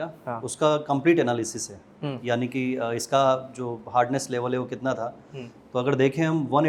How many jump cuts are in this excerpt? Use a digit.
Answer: 0